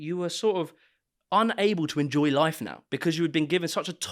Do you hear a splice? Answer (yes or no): no